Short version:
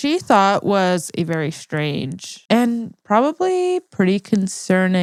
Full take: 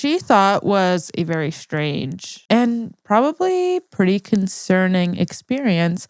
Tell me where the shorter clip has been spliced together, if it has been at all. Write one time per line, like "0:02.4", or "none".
none